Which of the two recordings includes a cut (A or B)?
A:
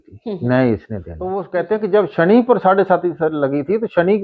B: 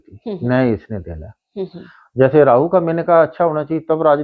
A